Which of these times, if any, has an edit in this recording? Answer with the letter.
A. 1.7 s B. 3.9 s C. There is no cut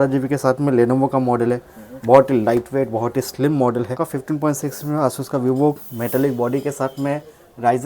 B